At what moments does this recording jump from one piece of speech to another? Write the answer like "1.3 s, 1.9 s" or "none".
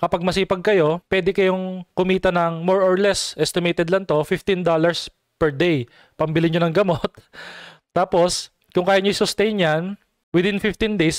1.0 s